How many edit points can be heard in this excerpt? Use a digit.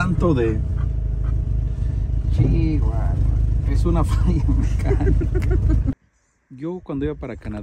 1